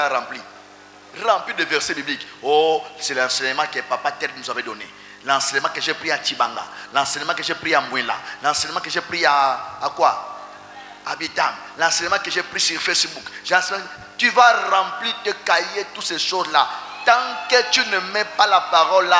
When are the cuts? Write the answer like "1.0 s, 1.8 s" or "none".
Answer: none